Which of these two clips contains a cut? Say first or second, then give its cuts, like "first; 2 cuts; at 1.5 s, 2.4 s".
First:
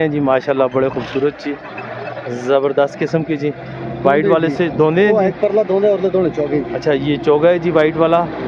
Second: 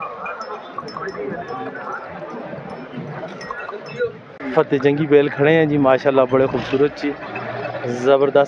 second; 1 cut; at 4.4 s